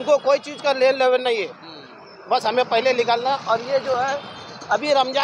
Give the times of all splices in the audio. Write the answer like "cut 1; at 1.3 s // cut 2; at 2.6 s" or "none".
none